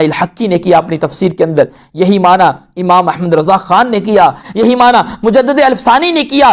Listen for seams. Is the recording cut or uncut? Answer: cut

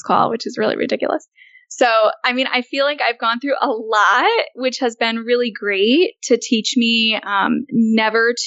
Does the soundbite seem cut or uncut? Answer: uncut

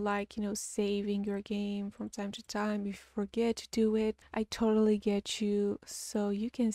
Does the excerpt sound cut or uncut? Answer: uncut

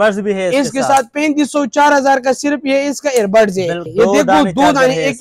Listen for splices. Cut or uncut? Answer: cut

